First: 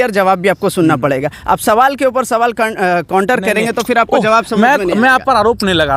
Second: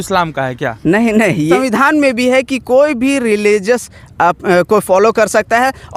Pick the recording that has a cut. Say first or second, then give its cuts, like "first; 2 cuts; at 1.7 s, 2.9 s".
second; 1 cut; at 1.6 s